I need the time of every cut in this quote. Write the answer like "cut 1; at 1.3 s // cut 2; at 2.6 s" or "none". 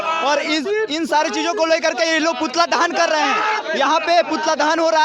none